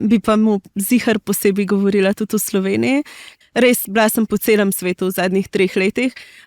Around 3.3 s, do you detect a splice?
yes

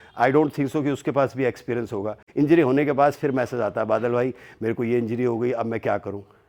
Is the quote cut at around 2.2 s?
yes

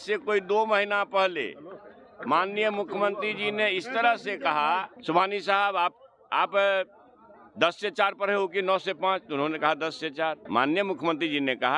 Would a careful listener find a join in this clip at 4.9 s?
yes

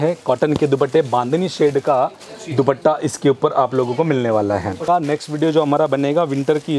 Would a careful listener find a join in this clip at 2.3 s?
no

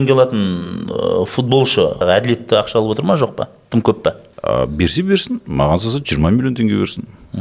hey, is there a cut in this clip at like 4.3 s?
yes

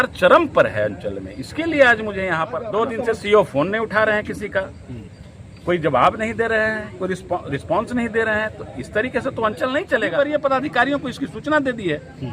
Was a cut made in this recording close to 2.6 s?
yes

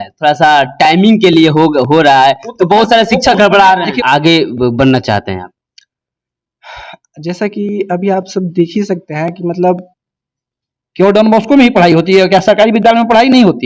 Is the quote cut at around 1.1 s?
no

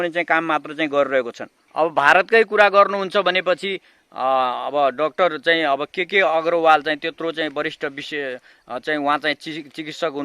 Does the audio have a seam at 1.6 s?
yes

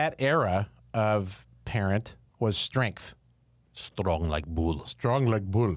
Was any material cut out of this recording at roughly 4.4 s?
no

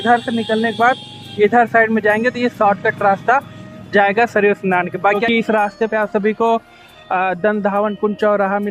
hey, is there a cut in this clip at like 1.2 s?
no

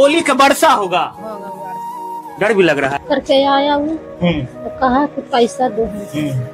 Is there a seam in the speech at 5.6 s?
no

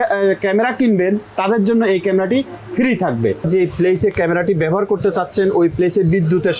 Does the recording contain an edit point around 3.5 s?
yes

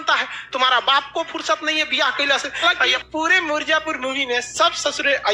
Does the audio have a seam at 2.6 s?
yes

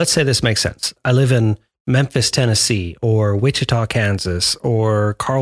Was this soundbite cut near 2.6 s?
no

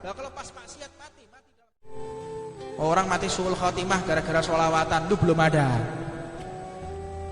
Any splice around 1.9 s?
yes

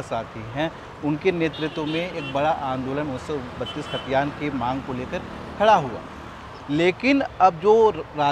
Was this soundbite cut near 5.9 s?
no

